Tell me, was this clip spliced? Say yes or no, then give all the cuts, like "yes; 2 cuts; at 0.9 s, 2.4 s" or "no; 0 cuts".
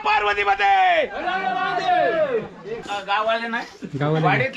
yes; 1 cut; at 2.8 s